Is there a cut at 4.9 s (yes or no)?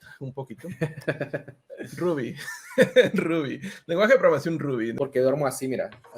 yes